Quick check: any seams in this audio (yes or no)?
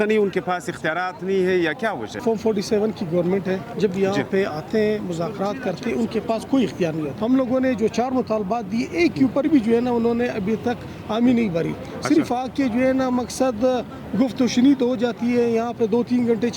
yes